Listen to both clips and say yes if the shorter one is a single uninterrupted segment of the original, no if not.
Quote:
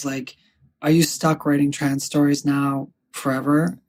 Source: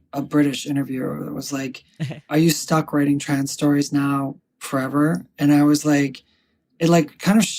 yes